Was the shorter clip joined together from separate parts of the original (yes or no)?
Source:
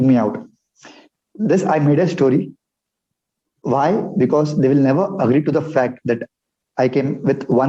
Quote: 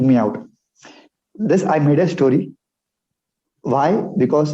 no